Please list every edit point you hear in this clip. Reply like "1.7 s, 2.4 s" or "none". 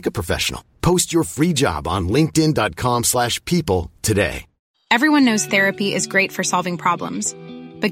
4.6 s